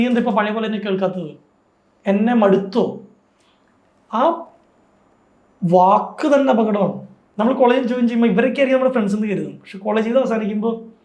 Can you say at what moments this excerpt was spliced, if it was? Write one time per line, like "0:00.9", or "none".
0:07.2